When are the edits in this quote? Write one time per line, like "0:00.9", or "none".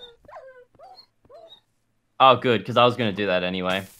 none